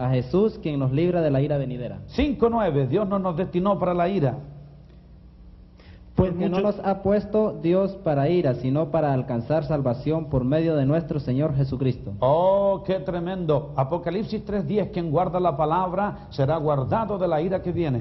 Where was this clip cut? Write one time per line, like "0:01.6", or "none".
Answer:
0:01.8